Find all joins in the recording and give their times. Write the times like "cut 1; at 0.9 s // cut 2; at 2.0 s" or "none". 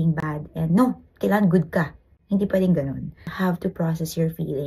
cut 1; at 3.3 s